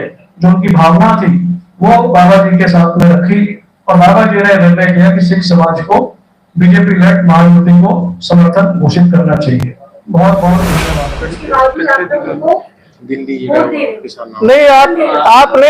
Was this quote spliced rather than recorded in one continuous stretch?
yes; 1 cut; at 10.9 s

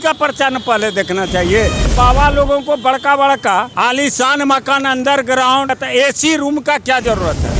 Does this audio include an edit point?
yes; 3 cuts; at 1.9 s, 3.7 s, 5.7 s

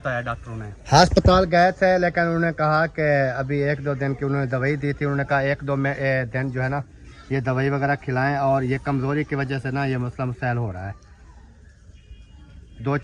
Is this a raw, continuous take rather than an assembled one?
yes; 0 cuts

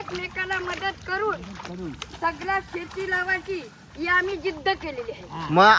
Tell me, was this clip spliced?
no; 0 cuts

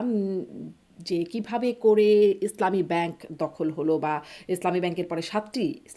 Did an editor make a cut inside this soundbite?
no; 0 cuts

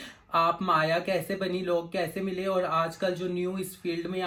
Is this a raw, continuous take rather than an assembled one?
yes; 0 cuts

